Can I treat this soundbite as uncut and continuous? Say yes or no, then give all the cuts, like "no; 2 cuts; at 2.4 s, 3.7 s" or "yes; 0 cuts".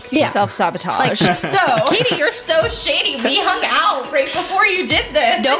no; 1 cut; at 1.2 s